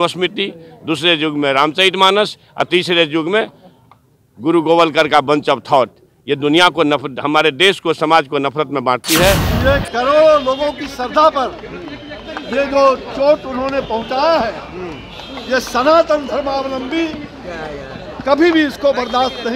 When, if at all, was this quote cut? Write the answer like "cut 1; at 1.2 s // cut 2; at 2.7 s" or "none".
cut 1; at 9.5 s